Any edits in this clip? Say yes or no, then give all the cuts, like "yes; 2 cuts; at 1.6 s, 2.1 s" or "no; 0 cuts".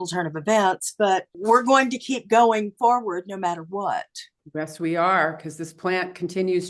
yes; 1 cut; at 1.3 s